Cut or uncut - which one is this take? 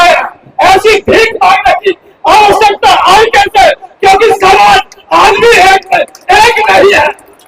uncut